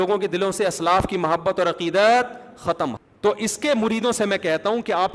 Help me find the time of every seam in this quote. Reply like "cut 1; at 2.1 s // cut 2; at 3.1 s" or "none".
cut 1; at 2.9 s